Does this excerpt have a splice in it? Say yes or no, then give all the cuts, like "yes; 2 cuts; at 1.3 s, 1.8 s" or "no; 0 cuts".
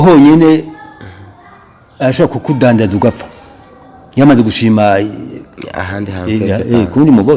no; 0 cuts